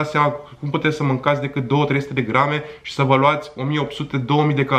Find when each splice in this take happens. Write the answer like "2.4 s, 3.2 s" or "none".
none